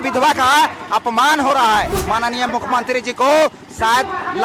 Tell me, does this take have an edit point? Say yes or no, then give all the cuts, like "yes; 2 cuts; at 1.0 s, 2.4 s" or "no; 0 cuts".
yes; 1 cut; at 2.2 s